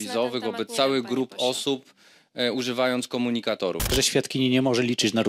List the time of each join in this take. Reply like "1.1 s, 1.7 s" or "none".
3.9 s